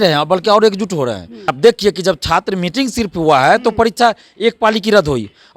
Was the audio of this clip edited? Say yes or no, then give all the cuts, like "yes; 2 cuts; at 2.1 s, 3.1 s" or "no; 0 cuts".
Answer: yes; 1 cut; at 1.5 s